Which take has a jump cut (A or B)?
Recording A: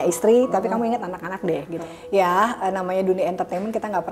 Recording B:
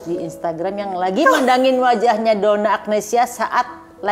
A